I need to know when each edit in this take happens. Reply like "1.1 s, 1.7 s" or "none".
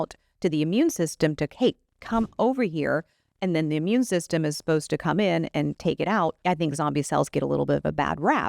6.4 s